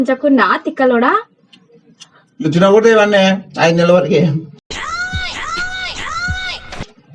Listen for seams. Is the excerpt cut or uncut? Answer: uncut